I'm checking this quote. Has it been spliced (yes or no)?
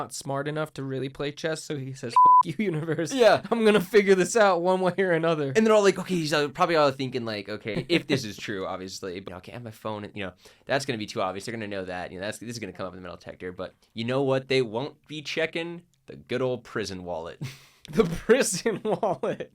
yes